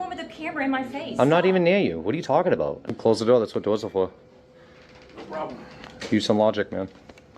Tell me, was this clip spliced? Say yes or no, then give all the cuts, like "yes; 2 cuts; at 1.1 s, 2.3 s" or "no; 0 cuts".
yes; 1 cut; at 2.9 s